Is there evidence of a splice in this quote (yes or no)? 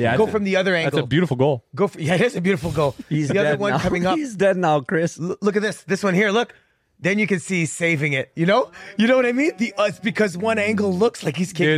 no